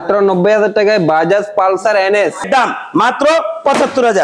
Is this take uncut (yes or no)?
no